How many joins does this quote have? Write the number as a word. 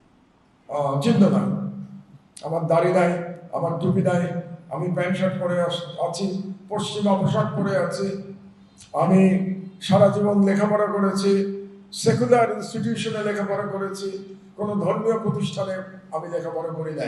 zero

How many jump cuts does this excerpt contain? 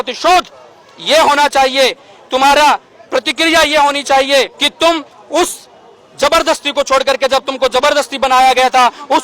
one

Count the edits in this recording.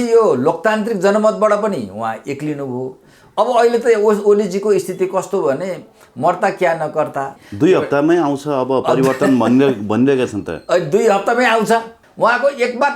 two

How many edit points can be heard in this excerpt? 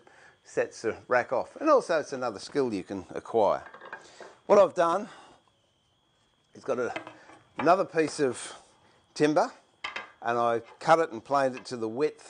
one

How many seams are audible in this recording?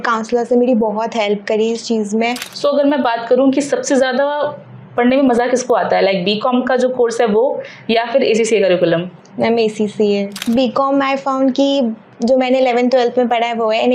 two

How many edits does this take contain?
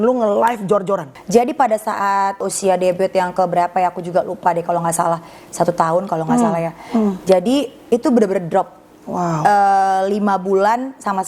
two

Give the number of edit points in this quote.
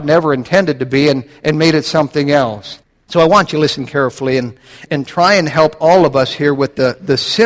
one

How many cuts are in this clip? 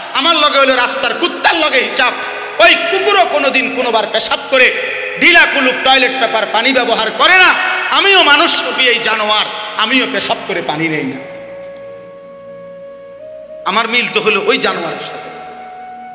one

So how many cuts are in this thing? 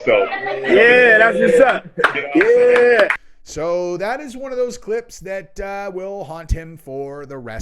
one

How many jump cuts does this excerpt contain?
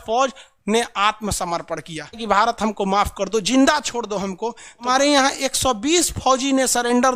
two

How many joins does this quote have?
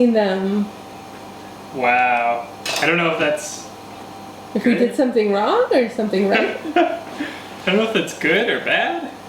two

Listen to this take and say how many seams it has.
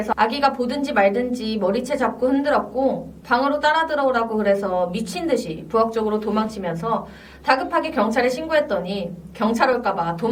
zero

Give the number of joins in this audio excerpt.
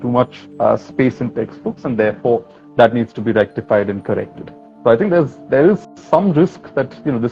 zero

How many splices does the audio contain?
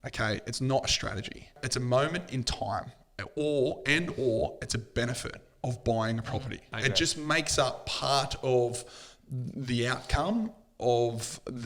two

